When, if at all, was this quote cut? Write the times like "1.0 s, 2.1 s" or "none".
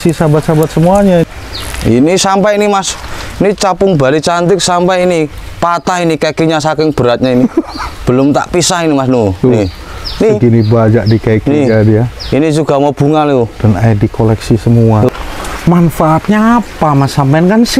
1.2 s, 15.1 s